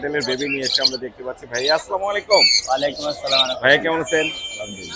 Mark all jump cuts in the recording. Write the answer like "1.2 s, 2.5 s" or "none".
none